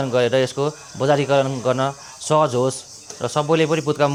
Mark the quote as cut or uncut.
uncut